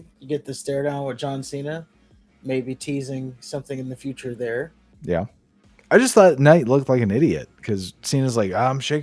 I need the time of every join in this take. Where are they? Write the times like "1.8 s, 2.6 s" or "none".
none